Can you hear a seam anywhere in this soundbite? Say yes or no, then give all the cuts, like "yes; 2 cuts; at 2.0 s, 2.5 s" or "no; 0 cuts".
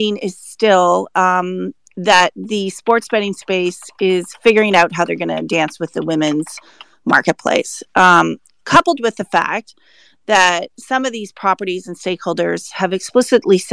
no; 0 cuts